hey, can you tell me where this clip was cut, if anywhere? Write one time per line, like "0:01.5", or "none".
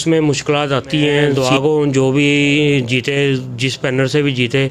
0:01.4